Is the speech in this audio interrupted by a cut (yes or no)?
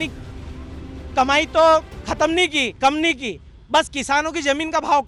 no